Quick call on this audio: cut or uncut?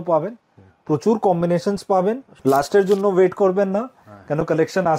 cut